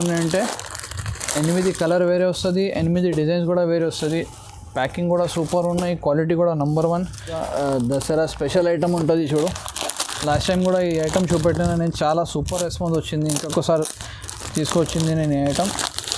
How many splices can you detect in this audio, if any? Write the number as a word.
one